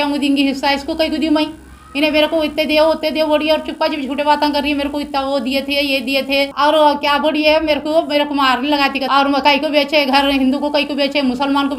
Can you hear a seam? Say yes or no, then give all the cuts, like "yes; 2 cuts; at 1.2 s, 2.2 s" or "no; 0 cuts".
yes; 2 cuts; at 6.5 s, 9.0 s